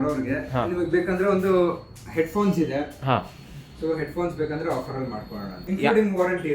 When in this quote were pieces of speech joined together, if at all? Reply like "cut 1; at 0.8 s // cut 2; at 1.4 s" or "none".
cut 1; at 5.6 s